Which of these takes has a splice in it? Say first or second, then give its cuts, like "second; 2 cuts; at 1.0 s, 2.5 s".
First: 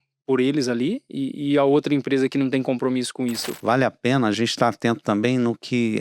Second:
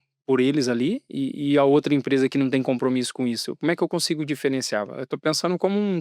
first; 1 cut; at 3.5 s